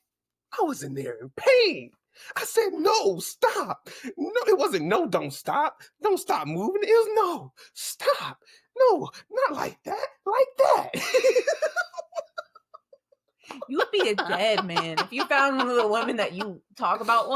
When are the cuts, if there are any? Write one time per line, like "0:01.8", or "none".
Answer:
none